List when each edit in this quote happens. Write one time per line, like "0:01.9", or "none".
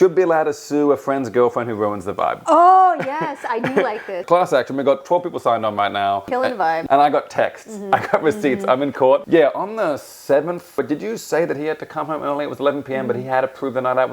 0:04.1
0:06.7
0:09.2
0:10.8